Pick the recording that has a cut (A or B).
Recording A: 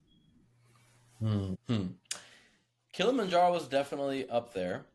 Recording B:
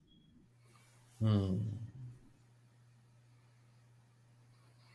A